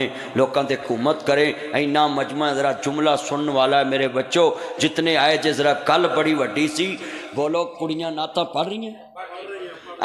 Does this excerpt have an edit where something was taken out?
no; 0 cuts

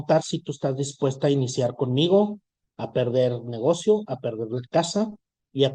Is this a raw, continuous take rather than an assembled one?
yes; 0 cuts

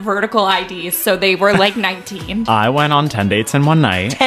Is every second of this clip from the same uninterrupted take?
no; 1 cut; at 2.4 s

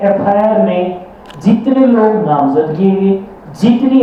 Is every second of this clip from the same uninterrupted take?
yes; 0 cuts

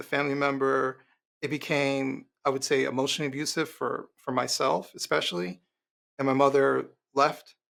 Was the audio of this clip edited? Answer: no; 0 cuts

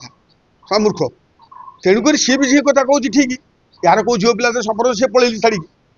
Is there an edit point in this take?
no; 0 cuts

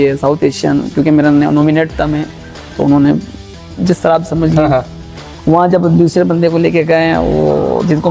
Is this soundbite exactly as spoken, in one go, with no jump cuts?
yes; 0 cuts

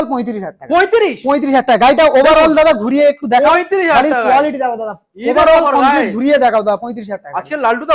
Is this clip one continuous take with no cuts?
yes; 0 cuts

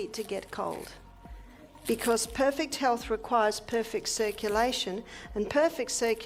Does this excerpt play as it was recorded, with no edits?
yes; 0 cuts

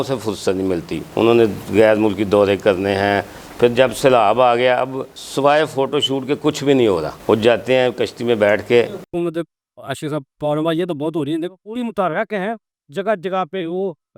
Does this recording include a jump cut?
no; 0 cuts

